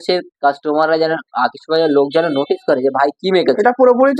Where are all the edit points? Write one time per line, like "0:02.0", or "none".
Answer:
none